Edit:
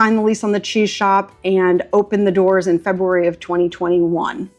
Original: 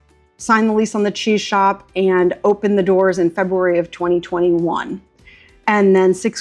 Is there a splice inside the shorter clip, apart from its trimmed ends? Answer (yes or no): no